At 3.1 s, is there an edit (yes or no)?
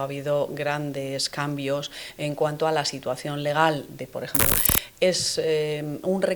no